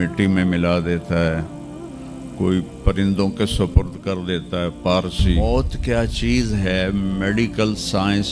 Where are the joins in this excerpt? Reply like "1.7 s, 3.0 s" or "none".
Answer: 5.4 s